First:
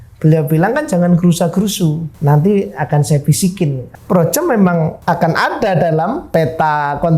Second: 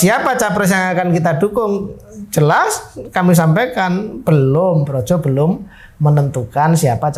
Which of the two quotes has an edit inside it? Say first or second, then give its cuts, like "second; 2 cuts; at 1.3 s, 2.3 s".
first; 4 cuts; at 2.1 s, 3.9 s, 5.0 s, 6.3 s